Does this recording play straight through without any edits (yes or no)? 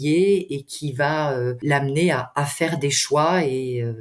no